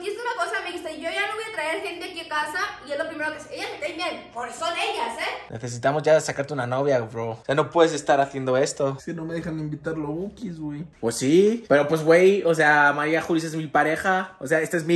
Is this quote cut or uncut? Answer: cut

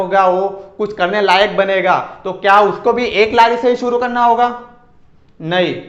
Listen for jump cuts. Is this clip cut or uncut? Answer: uncut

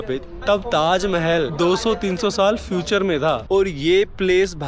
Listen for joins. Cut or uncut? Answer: cut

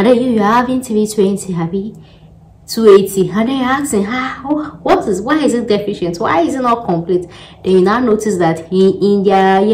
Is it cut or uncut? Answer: uncut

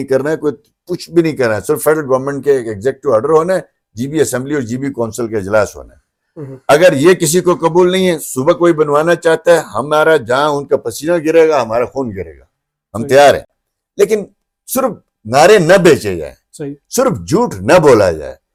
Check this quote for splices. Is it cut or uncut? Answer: uncut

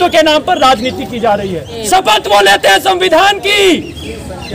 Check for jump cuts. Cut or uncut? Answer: cut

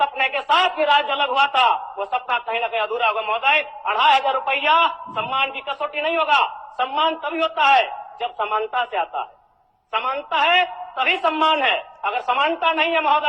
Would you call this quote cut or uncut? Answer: uncut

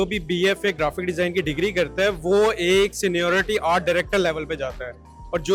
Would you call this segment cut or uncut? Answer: uncut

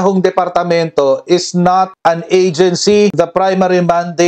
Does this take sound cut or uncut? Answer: uncut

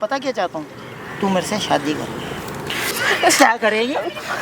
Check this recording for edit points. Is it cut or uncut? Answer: cut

